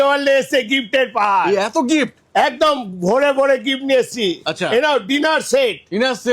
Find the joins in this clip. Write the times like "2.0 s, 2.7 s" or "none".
none